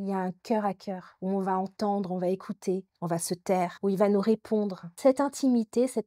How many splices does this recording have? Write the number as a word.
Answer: one